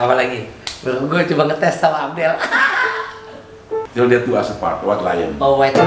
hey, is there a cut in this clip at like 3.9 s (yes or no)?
yes